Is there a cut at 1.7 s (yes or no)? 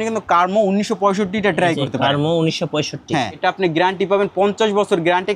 no